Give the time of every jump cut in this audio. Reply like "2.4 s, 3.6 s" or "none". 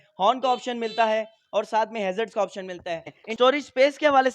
3.2 s